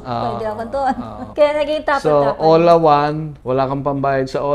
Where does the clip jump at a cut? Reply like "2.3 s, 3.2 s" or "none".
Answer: 1.2 s, 3.3 s